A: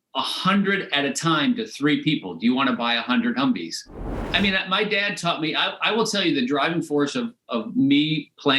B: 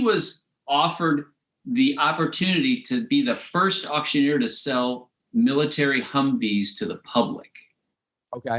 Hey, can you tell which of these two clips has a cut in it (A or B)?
A